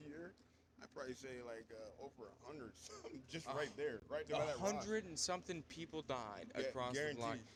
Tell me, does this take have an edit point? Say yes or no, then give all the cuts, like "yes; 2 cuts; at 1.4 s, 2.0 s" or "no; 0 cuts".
no; 0 cuts